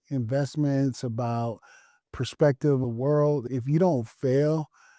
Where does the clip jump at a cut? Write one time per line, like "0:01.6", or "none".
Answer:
0:01.9
0:03.2